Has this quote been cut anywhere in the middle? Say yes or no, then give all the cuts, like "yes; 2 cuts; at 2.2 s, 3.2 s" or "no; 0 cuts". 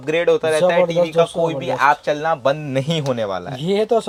no; 0 cuts